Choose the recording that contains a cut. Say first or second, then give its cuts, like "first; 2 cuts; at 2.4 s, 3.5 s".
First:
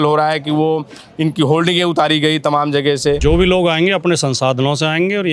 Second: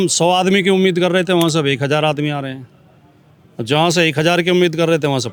first; 1 cut; at 3.2 s